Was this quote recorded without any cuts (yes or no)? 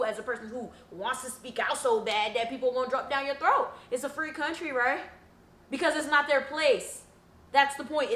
yes